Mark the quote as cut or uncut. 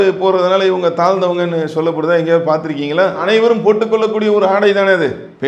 uncut